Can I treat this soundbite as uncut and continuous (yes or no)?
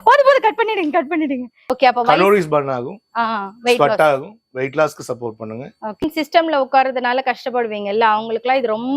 no